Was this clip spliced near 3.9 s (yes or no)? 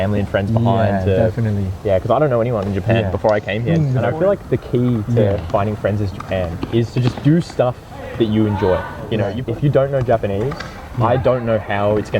yes